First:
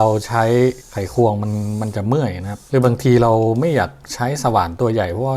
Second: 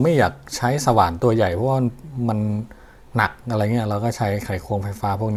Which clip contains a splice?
first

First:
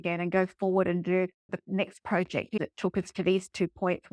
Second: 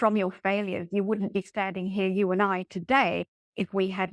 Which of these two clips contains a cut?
first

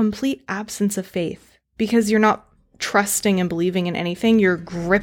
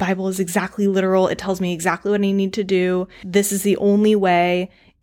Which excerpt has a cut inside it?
second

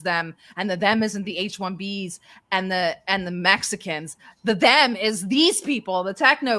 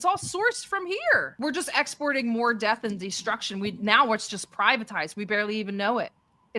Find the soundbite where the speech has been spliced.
second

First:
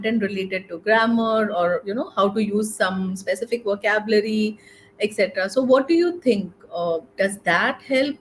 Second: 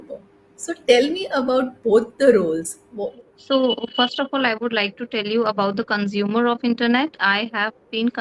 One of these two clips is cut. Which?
second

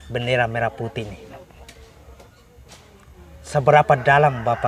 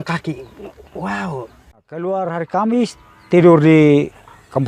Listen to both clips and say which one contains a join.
second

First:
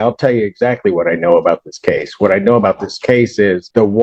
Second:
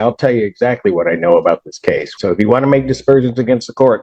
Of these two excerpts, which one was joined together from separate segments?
second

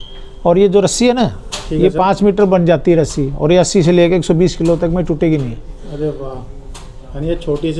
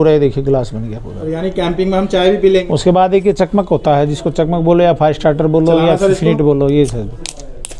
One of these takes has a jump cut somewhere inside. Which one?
second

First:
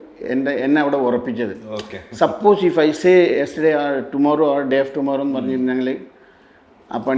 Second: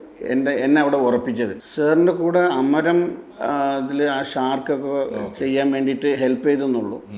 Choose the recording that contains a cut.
second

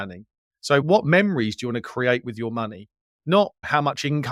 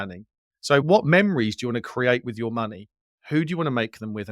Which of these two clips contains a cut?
second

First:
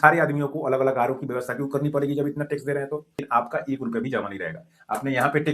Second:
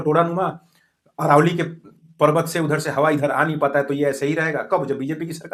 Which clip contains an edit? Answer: first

